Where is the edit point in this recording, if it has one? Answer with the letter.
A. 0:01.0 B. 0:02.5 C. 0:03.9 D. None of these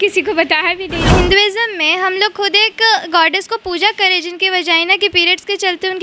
A